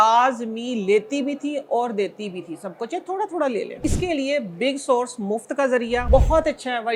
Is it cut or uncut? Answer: cut